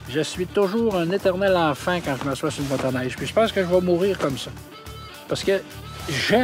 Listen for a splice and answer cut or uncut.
uncut